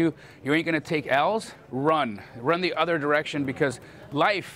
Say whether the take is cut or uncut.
cut